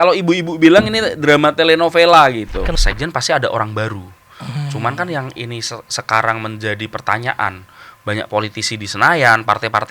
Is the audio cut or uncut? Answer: cut